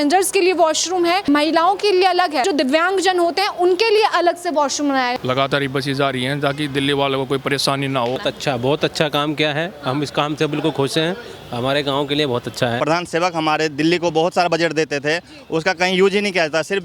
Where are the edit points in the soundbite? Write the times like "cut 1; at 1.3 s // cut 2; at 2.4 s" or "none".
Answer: cut 1; at 2.4 s // cut 2; at 5.1 s // cut 3; at 8.2 s // cut 4; at 12.8 s